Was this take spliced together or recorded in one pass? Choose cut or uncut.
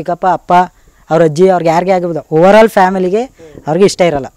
uncut